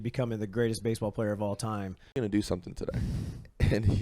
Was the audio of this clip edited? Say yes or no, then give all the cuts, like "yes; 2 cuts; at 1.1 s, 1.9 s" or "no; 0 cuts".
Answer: yes; 1 cut; at 2.1 s